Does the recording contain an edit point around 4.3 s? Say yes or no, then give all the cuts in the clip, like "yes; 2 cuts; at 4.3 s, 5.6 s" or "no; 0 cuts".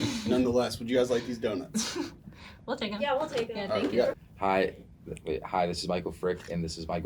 yes; 1 cut; at 4.3 s